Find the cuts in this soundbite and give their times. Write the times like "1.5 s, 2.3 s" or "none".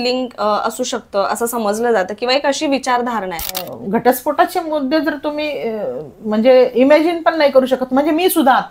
3.7 s